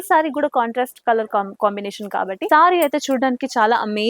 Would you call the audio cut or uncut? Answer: cut